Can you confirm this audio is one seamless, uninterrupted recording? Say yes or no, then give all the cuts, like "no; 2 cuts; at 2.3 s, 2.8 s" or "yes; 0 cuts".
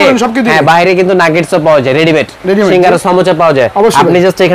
yes; 0 cuts